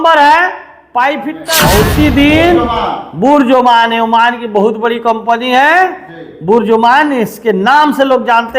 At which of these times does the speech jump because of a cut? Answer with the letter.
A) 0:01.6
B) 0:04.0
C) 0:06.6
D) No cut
A